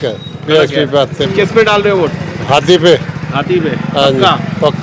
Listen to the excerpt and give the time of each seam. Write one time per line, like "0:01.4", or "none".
0:01.3